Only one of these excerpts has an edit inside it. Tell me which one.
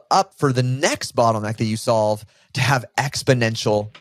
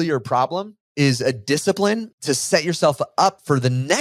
second; 1 cut; at 2.1 s

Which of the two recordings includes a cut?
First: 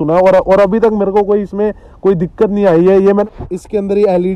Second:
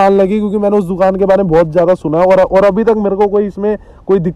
first; 1 cut; at 3.2 s

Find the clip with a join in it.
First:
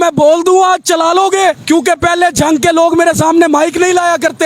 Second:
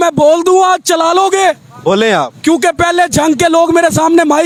first; 1 cut; at 1.6 s

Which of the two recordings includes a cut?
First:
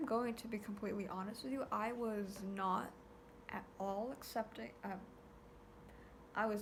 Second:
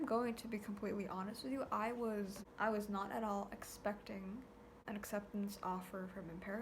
second; 2 cuts; at 2.4 s, 4.7 s

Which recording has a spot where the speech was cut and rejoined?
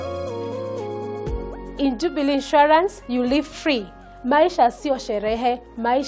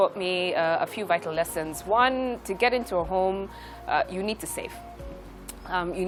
first; 1 cut; at 1.6 s

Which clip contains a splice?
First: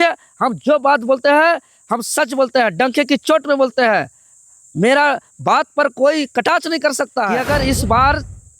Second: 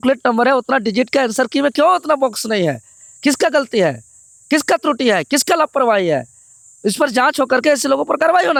first; 1 cut; at 7.3 s

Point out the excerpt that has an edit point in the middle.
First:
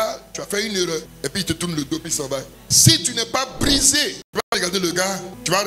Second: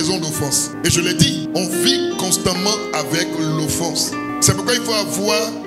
first; 1 cut; at 1.1 s

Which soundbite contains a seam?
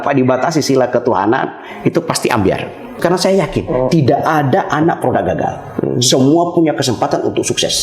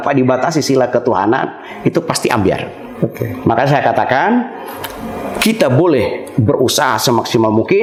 first; 1 cut; at 3.0 s

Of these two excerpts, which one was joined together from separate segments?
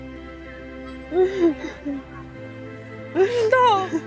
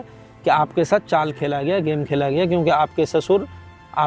first; 1 cut; at 1.1 s

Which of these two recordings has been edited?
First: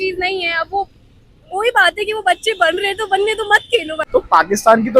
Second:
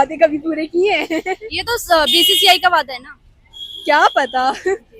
first; 1 cut; at 4.0 s

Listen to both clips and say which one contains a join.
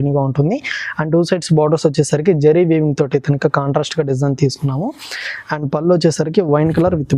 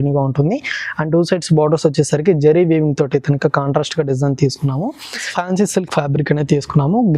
second; 1 cut; at 5.3 s

